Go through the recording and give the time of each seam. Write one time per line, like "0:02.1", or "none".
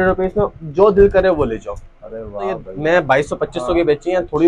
0:02.7